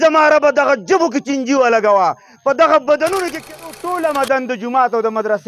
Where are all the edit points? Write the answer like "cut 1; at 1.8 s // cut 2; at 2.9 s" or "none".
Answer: cut 1; at 3.4 s